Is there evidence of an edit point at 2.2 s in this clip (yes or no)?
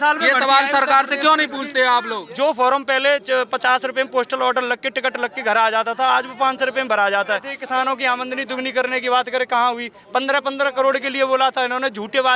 yes